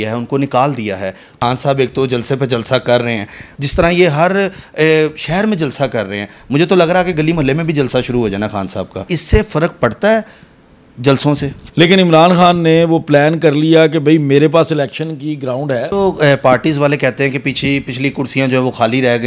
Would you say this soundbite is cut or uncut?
cut